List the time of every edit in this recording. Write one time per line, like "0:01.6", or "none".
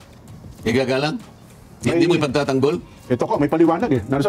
none